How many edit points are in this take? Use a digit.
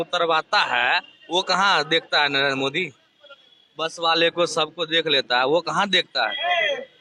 0